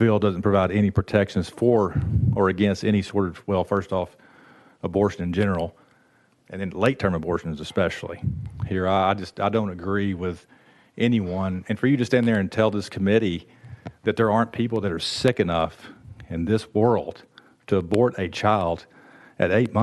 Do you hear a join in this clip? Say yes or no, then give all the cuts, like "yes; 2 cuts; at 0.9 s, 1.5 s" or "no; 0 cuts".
no; 0 cuts